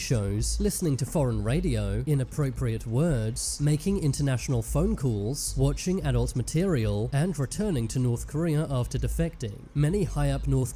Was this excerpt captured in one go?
no; 1 cut; at 1.3 s

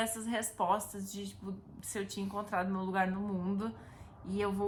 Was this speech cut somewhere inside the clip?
no; 0 cuts

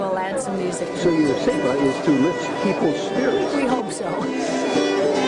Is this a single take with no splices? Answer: no; 1 cut; at 4.3 s

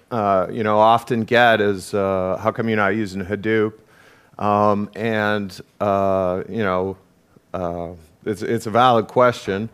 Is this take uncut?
yes; 0 cuts

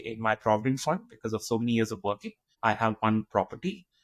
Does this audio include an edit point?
yes; 1 cut; at 2.5 s

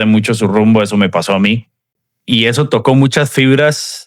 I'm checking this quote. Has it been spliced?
no; 0 cuts

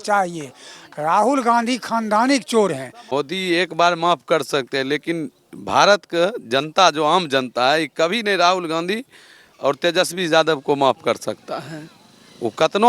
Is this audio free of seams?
no; 1 cut; at 2.9 s

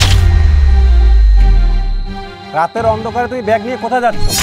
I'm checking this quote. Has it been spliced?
no; 0 cuts

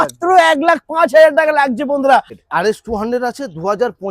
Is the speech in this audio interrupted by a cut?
yes; 1 cut; at 2.4 s

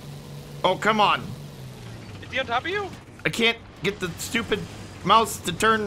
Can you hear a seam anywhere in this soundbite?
yes; 1 cut; at 3.1 s

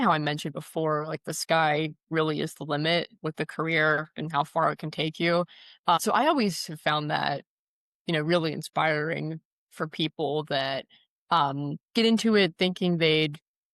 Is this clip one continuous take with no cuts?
no; 1 cut; at 6.0 s

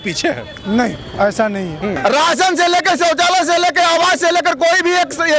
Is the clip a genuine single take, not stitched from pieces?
no; 1 cut; at 2.0 s

